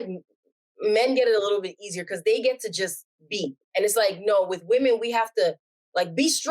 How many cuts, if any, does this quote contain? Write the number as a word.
one